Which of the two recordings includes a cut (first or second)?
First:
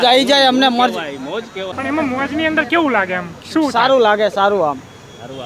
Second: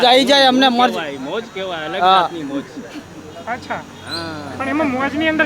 first